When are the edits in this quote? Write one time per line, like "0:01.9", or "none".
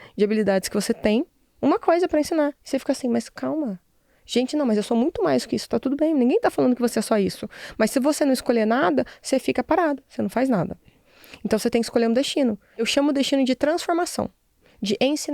0:12.7